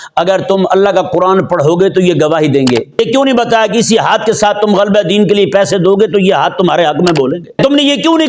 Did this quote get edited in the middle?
yes; 2 cuts; at 3.0 s, 7.6 s

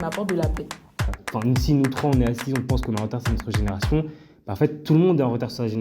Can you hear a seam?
yes; 1 cut; at 1.2 s

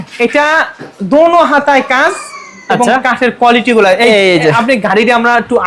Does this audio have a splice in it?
no; 0 cuts

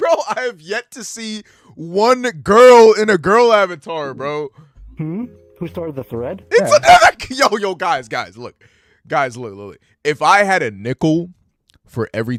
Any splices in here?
no; 0 cuts

